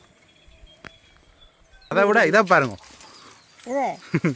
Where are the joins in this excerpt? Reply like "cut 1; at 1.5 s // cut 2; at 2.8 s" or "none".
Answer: cut 1; at 1.9 s